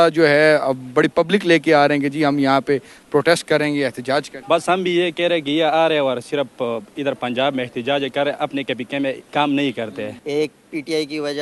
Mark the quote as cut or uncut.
cut